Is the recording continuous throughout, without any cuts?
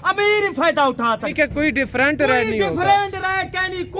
no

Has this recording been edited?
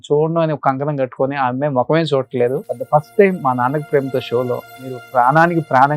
yes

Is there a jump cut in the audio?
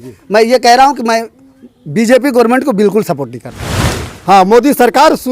yes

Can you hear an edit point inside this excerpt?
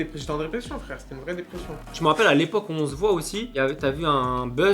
yes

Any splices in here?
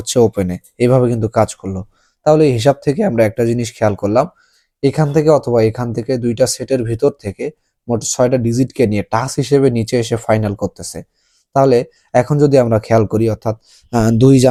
no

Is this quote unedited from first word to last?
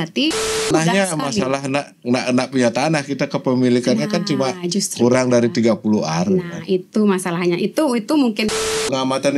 no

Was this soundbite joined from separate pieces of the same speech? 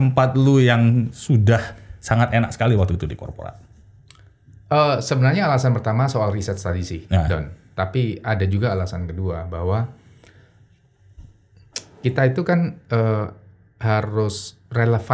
no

